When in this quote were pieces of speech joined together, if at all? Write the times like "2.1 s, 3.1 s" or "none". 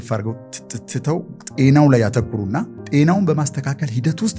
2.8 s